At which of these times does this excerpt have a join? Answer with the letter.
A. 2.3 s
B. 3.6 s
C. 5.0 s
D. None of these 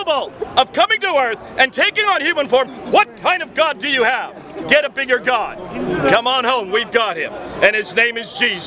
D